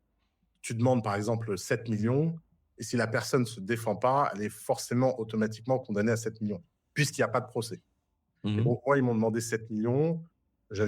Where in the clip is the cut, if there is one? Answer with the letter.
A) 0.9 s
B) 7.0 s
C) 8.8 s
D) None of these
D